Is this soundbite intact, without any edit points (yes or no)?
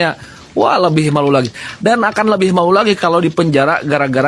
yes